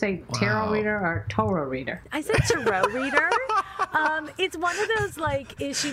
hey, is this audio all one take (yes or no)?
no